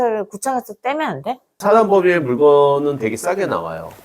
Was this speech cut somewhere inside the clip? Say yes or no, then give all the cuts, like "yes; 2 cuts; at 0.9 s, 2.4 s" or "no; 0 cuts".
yes; 1 cut; at 1.5 s